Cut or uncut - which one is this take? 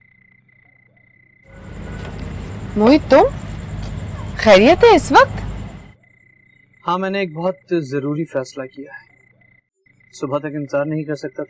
cut